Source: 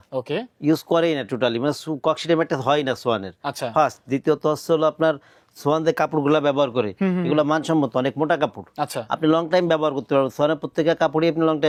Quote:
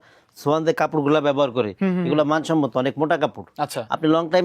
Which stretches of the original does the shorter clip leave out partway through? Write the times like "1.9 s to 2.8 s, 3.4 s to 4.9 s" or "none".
none

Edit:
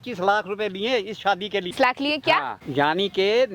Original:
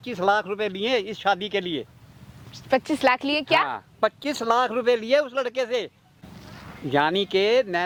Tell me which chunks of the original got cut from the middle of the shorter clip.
1.7 s to 3.0 s, 3.8 s to 6.7 s

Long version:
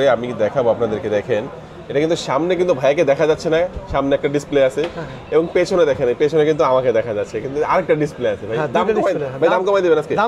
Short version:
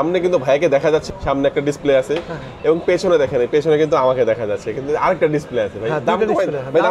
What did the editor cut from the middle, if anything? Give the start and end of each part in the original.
3.4 s to 3.7 s

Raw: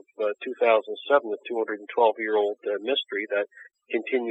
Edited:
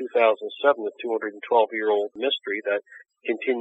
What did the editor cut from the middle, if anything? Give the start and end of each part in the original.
2.6 s to 2.8 s

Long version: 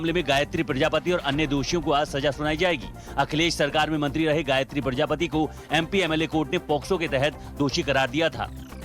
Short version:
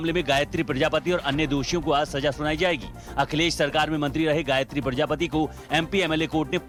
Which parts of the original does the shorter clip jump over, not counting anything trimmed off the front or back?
none

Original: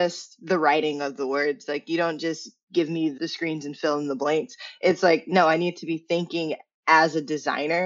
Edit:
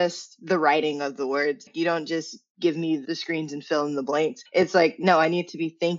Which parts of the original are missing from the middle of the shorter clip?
1.7 s to 1.8 s, 4.5 s to 4.7 s

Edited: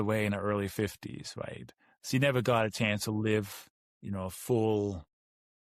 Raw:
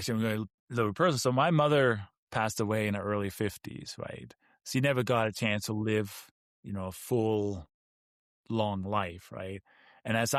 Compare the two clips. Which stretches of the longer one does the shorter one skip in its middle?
none

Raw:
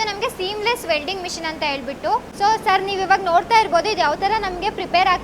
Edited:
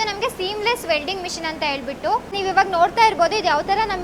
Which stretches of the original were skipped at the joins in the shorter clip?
2.3 s to 2.9 s

